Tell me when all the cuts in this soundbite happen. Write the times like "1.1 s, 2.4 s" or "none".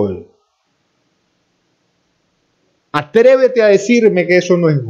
none